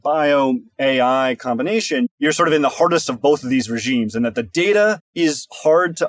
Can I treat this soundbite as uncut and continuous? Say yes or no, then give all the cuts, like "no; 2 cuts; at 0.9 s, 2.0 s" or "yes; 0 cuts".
no; 2 cuts; at 2.1 s, 5.1 s